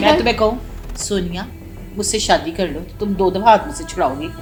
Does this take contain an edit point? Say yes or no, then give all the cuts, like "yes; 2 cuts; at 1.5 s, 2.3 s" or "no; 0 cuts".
no; 0 cuts